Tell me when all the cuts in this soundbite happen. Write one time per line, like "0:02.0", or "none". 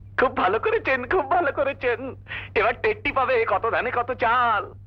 none